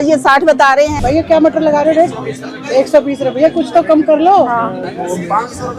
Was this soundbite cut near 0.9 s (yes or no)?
yes